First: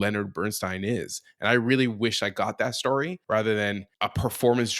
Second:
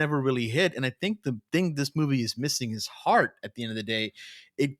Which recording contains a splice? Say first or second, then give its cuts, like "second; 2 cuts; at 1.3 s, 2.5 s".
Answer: first; 2 cuts; at 3.2 s, 3.9 s